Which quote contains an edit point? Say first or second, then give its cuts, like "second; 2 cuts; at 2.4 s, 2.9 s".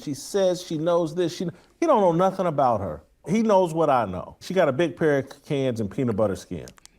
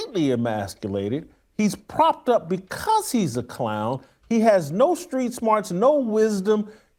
first; 2 cuts; at 3.3 s, 4.4 s